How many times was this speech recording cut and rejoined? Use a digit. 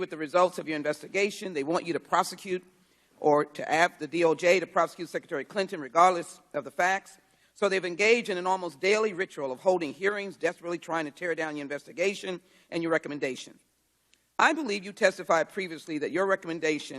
1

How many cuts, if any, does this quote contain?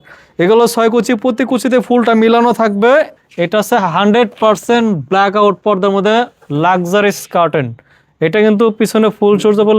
1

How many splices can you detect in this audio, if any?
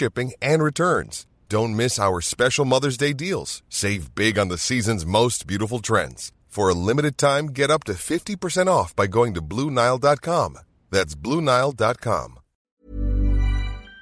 1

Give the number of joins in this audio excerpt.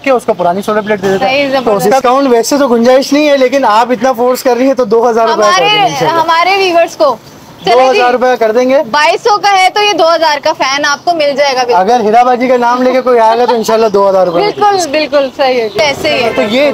2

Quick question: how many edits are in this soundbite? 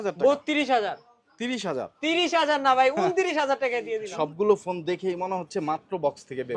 1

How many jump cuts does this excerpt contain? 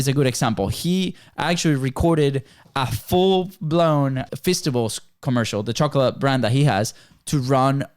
1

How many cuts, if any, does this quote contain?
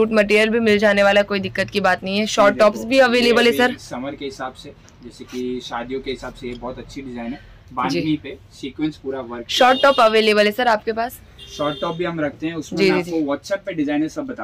0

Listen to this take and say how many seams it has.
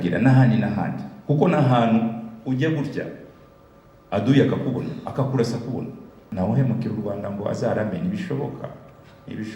1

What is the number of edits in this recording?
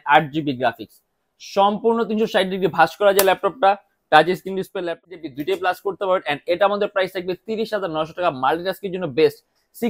1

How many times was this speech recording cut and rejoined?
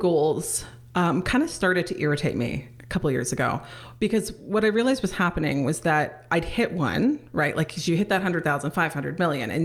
0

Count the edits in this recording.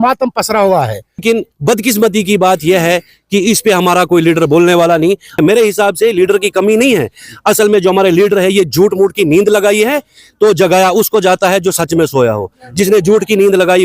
2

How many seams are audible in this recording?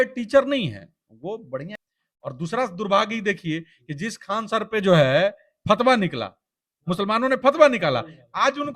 1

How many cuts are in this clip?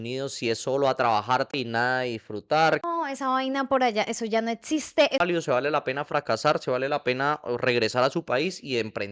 3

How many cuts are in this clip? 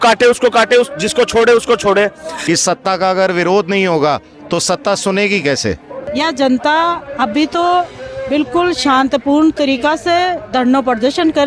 2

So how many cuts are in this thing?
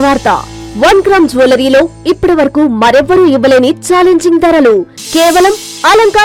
0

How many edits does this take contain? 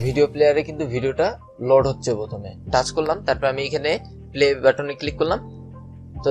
1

